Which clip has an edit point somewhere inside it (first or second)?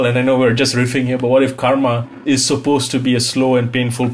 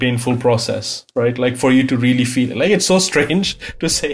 first